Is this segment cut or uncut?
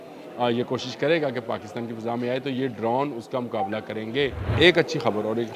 cut